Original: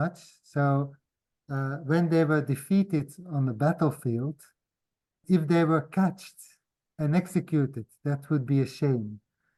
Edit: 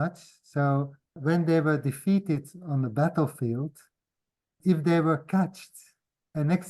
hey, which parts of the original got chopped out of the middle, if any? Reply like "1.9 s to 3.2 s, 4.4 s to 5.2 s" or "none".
1.1 s to 1.8 s